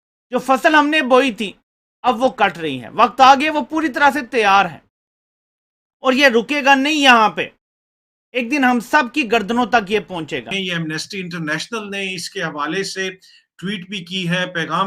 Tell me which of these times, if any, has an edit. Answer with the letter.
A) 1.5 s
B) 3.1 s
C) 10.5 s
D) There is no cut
C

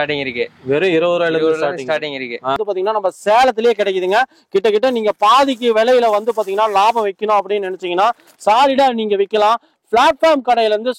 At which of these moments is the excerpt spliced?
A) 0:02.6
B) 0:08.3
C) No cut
A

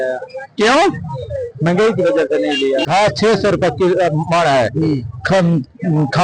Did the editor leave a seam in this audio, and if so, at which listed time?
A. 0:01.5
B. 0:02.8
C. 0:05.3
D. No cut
B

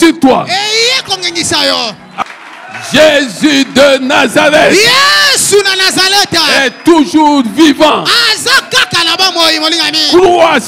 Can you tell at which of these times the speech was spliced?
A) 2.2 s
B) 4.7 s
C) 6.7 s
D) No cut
A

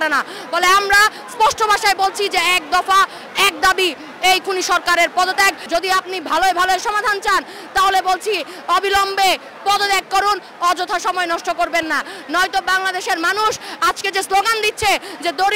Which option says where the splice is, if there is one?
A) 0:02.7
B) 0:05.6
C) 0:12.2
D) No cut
B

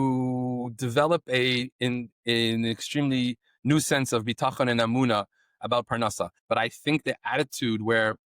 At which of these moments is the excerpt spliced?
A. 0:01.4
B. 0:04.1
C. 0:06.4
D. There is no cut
C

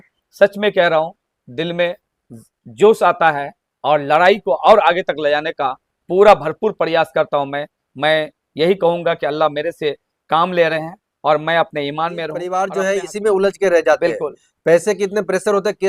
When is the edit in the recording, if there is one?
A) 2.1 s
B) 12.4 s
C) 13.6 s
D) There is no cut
B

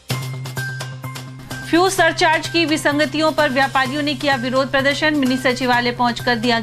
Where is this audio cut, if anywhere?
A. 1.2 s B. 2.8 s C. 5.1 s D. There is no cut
A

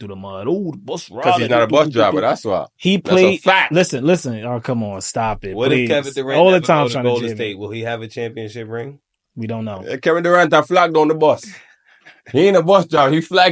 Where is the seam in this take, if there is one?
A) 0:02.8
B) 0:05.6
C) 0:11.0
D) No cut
D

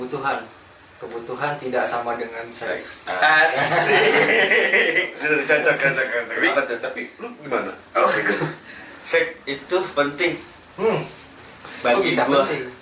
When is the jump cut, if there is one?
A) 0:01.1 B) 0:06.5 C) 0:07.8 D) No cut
B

